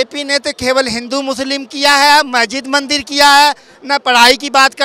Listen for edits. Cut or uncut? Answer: uncut